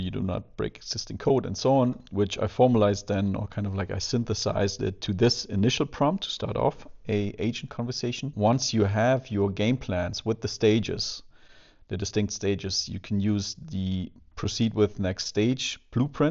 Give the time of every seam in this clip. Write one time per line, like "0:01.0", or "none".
0:08.3